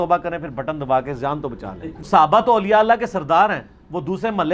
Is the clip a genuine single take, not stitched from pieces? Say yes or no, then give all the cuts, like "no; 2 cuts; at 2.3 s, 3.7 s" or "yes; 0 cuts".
no; 1 cut; at 2.1 s